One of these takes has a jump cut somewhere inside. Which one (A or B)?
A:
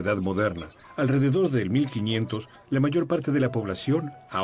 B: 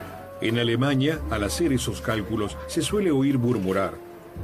B